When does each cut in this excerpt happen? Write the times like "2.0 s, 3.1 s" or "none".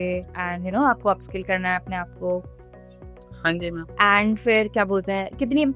3.9 s